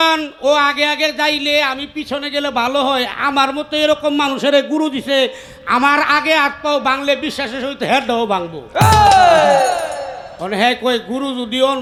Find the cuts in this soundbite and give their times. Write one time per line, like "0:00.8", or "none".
none